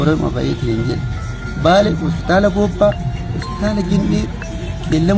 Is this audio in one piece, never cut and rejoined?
yes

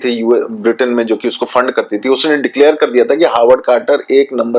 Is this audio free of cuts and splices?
yes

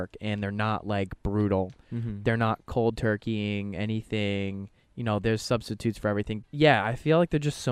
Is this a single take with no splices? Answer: no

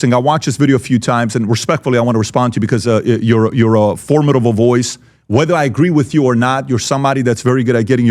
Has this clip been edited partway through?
no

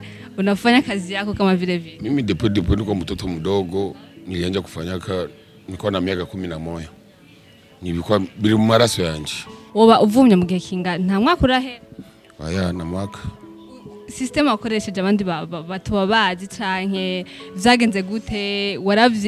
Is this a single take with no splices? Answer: no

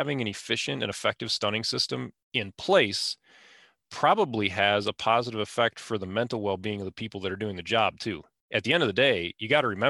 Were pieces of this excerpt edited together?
yes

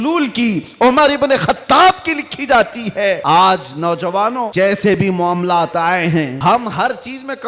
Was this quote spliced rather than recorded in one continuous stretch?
yes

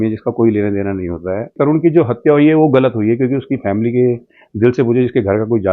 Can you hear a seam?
yes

